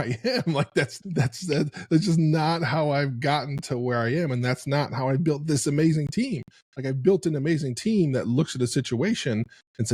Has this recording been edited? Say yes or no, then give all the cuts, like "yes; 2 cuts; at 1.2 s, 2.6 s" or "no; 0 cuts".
yes; 1 cut; at 0.9 s